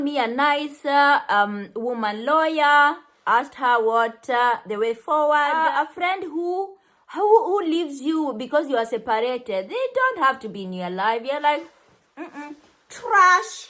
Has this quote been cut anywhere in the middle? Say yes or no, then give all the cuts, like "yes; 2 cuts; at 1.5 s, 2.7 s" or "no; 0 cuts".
yes; 1 cut; at 5.6 s